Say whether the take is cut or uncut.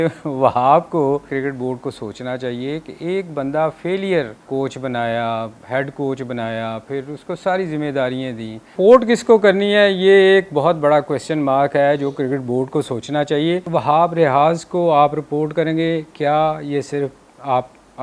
cut